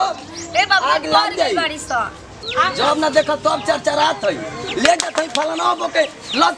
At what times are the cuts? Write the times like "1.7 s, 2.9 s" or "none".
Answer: 2.5 s